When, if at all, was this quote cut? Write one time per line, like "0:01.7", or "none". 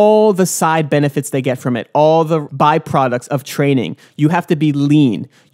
0:02.5